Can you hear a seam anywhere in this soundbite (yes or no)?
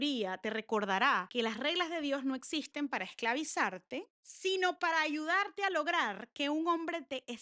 yes